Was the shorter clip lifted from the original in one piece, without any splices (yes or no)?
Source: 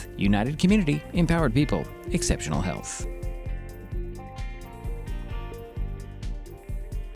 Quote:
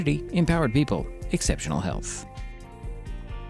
no